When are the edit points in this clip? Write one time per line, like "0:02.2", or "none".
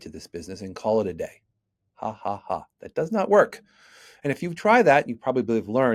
none